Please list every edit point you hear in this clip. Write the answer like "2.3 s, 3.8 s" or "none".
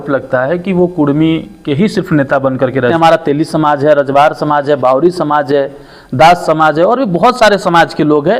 2.9 s

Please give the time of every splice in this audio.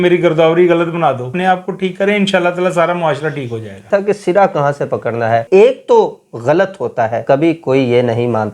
1.3 s, 3.8 s, 5.4 s, 7.2 s

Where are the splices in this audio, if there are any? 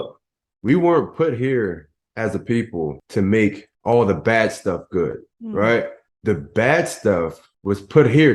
3.0 s, 3.7 s, 5.3 s, 6.0 s, 7.5 s

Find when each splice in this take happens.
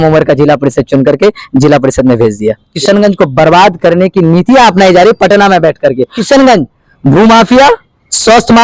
2.7 s, 6.1 s

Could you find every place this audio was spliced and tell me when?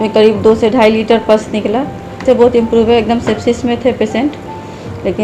2.2 s

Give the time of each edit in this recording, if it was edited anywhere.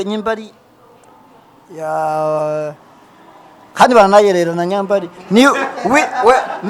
none

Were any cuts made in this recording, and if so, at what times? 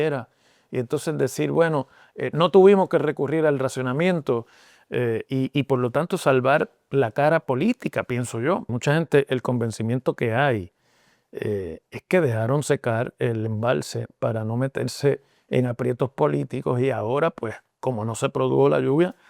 8.7 s

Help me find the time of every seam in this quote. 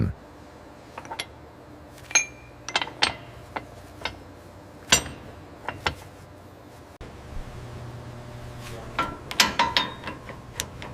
7.1 s

